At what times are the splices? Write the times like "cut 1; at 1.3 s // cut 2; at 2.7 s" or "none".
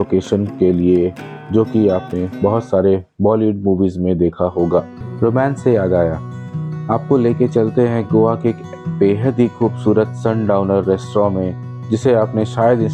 cut 1; at 5.0 s